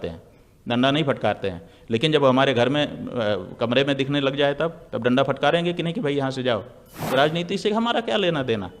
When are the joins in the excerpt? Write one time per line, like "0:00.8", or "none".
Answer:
0:07.0